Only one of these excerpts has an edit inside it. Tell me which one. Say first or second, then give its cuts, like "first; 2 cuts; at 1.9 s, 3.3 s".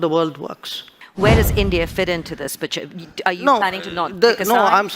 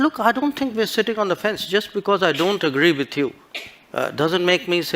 first; 1 cut; at 1.0 s